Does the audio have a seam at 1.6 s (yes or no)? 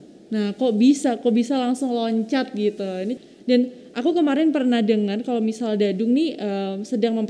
no